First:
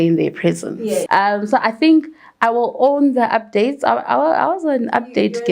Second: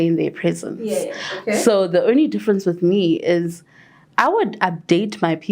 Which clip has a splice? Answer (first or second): first